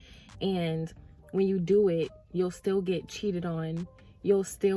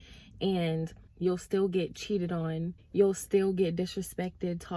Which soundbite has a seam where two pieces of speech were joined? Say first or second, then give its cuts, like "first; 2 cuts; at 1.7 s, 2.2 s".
second; 2 cuts; at 1.1 s, 2.8 s